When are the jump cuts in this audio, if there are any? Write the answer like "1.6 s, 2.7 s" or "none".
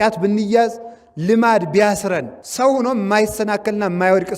2.4 s